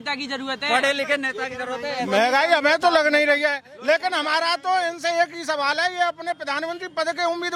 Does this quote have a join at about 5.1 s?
no; 0 cuts

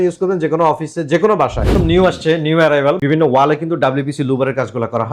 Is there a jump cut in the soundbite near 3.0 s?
yes; 2 cuts; at 1.7 s, 3.0 s

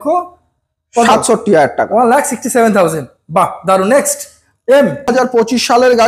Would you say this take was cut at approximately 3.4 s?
no; 1 cut; at 5.1 s

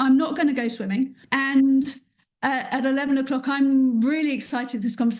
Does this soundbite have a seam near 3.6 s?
no; 1 cut; at 1.2 s

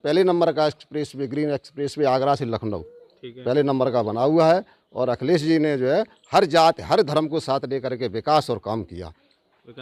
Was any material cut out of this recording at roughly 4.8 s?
no; 0 cuts

